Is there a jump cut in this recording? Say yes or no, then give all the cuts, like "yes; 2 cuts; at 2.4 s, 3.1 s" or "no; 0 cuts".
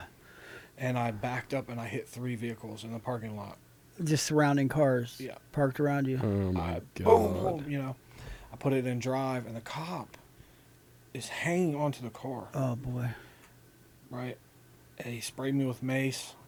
no; 0 cuts